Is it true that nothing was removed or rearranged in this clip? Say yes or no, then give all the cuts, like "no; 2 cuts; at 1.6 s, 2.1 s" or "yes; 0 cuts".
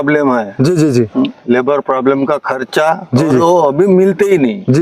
yes; 0 cuts